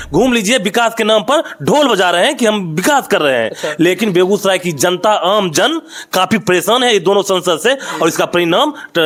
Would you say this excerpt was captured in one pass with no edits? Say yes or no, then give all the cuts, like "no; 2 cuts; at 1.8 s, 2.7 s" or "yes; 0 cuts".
yes; 0 cuts